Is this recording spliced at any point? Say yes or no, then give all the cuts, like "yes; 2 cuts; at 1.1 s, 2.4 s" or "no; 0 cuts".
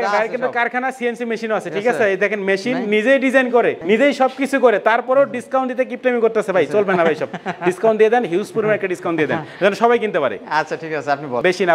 no; 0 cuts